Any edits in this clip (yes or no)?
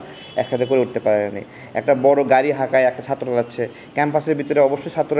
no